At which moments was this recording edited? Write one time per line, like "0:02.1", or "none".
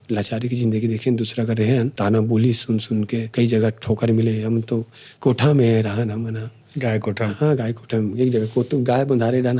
0:01.9
0:03.3
0:05.0